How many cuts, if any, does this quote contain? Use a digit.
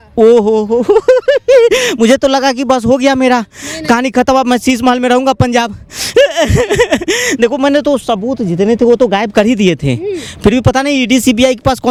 0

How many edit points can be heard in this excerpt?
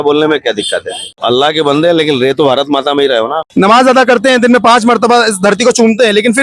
2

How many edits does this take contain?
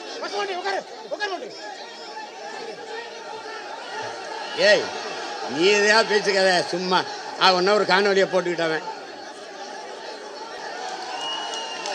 1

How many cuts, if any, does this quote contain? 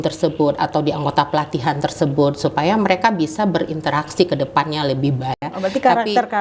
1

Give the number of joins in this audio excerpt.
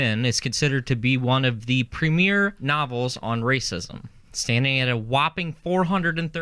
1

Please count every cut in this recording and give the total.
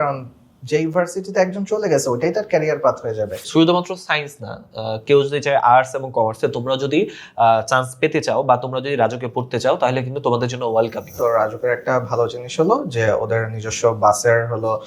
2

